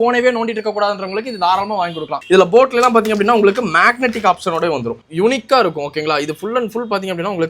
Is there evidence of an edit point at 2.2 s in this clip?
yes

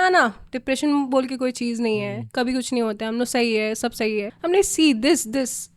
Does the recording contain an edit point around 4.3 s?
yes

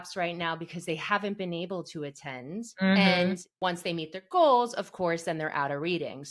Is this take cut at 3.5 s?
yes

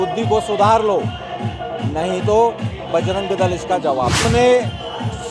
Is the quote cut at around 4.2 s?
yes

